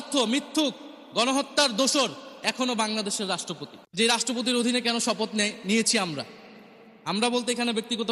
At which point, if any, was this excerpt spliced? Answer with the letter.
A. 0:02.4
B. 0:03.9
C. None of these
B